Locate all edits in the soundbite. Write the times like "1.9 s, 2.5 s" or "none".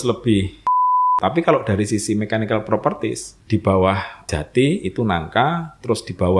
1.1 s, 3.3 s, 4.3 s